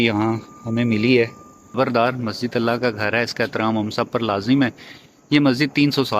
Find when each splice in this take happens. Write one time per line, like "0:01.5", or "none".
0:01.8